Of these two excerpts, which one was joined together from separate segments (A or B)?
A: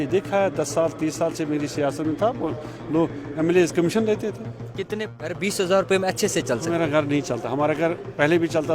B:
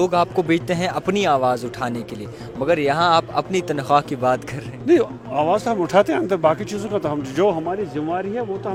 A